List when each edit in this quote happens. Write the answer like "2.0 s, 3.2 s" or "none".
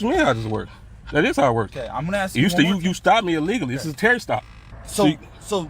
4.6 s